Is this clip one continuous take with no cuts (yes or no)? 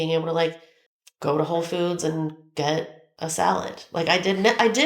no